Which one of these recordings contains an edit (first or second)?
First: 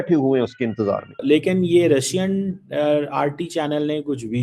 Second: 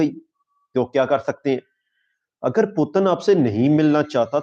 first